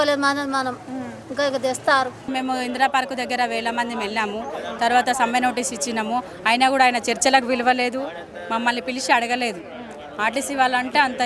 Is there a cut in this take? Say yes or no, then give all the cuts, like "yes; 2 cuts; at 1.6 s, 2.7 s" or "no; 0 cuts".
yes; 1 cut; at 2.3 s